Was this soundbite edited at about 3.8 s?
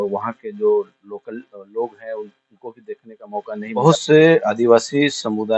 yes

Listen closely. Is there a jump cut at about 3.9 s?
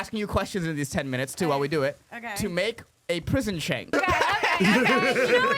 yes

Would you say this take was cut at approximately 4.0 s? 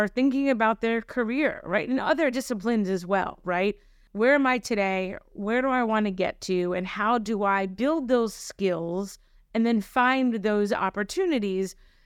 yes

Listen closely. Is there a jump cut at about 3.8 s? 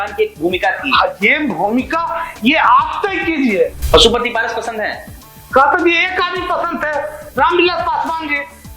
yes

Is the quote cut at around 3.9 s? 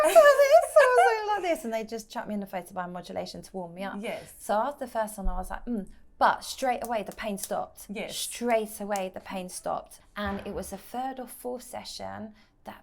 no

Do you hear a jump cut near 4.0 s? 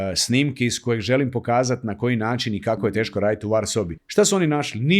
yes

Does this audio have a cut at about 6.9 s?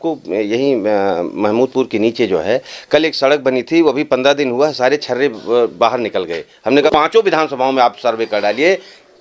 yes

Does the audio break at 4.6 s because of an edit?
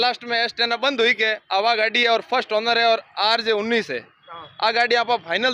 no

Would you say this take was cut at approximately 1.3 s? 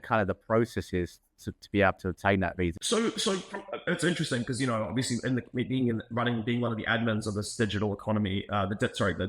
no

